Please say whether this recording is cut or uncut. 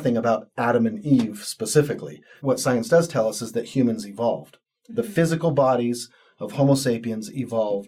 cut